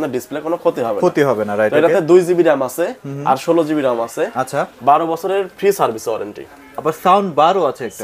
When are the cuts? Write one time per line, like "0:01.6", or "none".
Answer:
none